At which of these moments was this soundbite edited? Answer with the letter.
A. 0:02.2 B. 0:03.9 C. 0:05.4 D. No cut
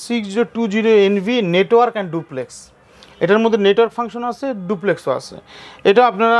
D